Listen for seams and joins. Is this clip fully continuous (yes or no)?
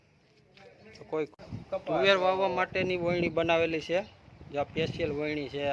no